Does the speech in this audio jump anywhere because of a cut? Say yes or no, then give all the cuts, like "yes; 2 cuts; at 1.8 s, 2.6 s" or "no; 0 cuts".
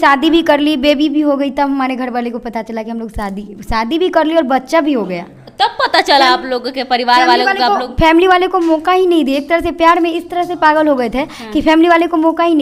no; 0 cuts